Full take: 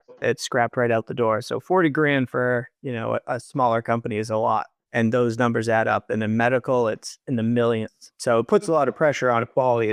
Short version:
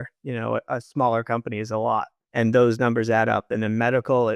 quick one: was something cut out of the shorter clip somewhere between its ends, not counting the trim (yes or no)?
no